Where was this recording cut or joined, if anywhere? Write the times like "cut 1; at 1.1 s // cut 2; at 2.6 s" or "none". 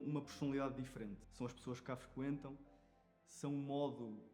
cut 1; at 1.2 s